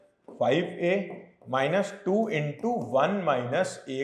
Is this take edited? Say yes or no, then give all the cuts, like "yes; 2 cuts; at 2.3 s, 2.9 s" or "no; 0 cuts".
no; 0 cuts